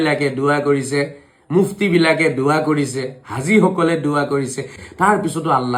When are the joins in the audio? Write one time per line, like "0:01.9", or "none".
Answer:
0:04.8